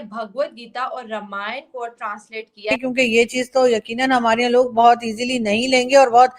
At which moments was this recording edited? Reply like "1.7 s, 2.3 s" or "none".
2.8 s